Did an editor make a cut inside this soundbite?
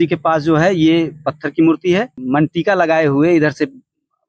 yes; 1 cut; at 2.2 s

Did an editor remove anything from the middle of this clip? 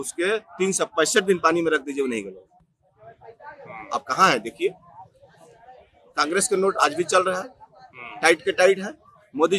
no; 0 cuts

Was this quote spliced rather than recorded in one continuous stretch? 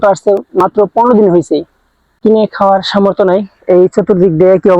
yes; 1 cut; at 2.2 s

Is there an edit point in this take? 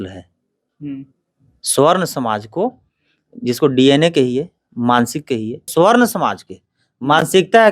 yes; 1 cut; at 5.7 s

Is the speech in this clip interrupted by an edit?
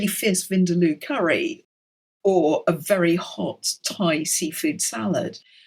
no; 0 cuts

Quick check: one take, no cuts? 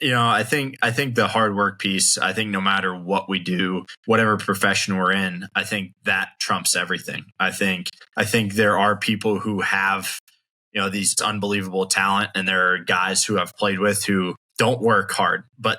no; 4 cuts; at 3.9 s, 8.0 s, 11.2 s, 14.4 s

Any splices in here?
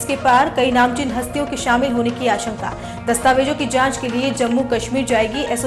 no; 0 cuts

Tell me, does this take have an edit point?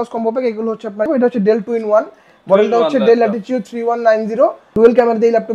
yes; 2 cuts; at 1.1 s, 4.6 s

